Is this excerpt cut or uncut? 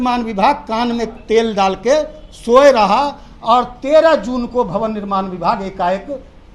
uncut